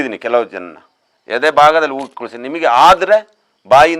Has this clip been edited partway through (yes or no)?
no